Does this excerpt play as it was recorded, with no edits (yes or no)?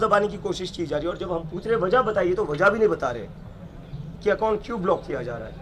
yes